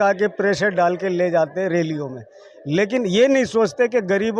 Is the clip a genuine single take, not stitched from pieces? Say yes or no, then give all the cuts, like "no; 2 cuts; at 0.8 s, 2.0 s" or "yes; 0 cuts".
yes; 0 cuts